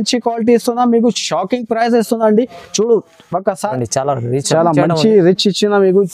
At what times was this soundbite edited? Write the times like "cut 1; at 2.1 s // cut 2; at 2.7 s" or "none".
cut 1; at 3.7 s